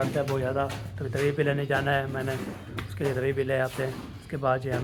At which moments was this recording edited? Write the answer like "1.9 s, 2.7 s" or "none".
none